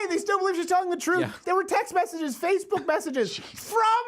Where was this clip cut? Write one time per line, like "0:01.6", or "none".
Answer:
0:01.4